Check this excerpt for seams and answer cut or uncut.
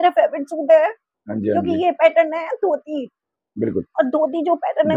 uncut